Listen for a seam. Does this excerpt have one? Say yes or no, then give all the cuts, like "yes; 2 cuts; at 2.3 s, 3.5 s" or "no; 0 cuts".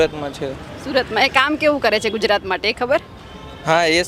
no; 0 cuts